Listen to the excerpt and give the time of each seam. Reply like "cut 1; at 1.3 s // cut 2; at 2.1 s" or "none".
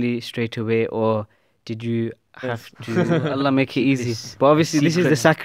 cut 1; at 3.0 s